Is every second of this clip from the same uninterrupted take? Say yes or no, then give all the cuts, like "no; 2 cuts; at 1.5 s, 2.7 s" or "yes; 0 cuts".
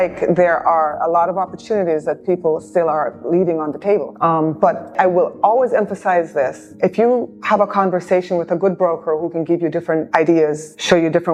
yes; 0 cuts